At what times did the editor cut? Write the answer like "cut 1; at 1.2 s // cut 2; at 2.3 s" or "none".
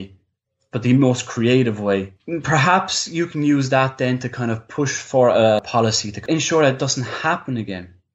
cut 1; at 6.2 s